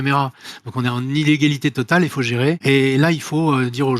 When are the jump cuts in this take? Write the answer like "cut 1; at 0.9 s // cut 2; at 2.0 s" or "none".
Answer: cut 1; at 2.6 s